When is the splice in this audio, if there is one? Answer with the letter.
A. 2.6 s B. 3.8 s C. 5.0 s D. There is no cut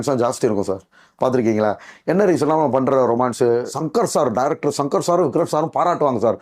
B